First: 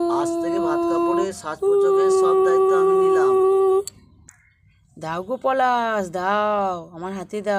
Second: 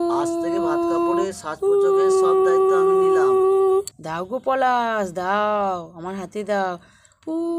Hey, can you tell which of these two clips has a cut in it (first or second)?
second